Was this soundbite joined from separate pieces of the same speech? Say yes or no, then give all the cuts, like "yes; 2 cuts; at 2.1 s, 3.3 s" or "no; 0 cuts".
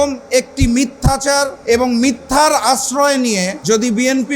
yes; 2 cuts; at 1.5 s, 3.5 s